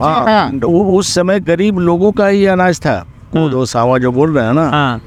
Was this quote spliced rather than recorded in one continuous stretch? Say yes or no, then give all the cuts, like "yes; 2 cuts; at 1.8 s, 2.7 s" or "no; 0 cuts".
no; 0 cuts